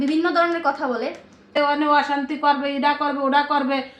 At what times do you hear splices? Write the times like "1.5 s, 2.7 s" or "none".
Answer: 1.5 s